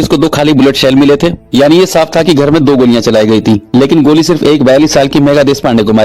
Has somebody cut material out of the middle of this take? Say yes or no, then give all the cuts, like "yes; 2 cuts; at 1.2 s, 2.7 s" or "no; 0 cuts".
yes; 1 cut; at 1.4 s